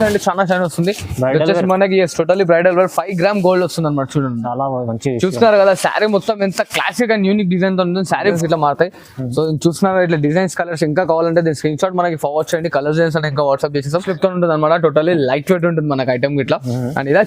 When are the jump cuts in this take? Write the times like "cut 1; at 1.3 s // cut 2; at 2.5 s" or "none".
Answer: cut 1; at 8.4 s // cut 2; at 14.0 s